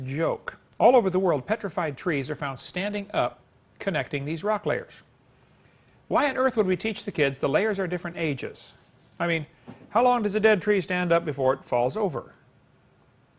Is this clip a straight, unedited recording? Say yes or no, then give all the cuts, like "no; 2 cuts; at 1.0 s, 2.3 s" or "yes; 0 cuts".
no; 1 cut; at 11.3 s